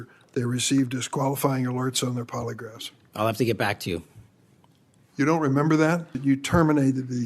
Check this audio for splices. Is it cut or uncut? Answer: cut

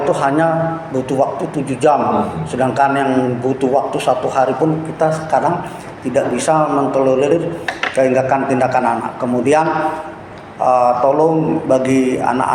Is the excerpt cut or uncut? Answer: uncut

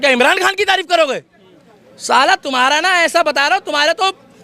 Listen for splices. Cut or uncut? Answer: uncut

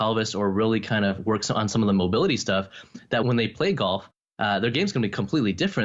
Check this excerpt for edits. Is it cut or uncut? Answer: cut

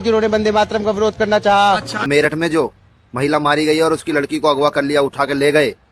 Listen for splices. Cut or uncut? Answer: cut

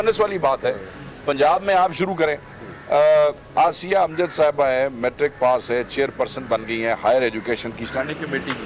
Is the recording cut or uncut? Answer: uncut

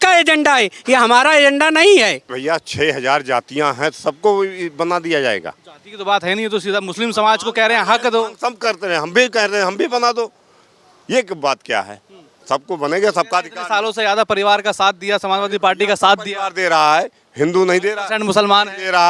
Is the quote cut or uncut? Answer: cut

